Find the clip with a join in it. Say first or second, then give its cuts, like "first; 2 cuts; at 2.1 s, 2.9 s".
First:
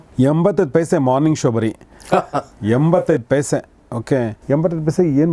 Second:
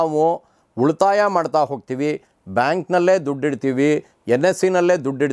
first; 1 cut; at 4.4 s